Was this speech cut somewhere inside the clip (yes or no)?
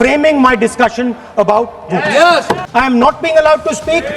yes